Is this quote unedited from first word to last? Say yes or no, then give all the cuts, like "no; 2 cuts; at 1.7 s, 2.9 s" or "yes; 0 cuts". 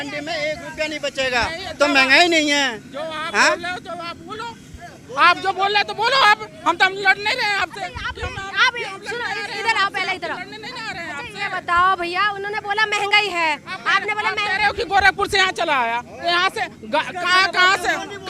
yes; 0 cuts